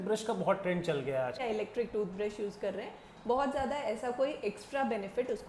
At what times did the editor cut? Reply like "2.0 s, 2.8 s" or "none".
1.4 s